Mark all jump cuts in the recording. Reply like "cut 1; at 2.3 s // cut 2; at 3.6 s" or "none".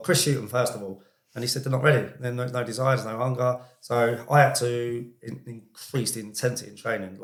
none